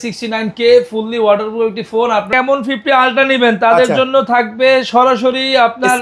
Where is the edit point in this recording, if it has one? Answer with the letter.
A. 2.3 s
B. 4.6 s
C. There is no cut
A